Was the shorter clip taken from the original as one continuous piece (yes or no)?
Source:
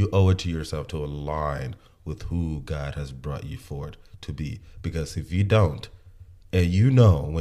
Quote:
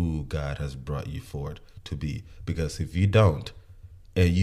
yes